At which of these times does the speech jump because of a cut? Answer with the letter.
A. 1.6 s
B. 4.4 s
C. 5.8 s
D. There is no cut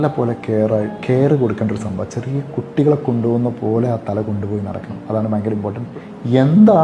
C